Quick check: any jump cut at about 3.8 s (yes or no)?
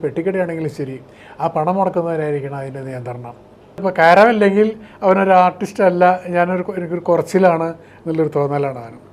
yes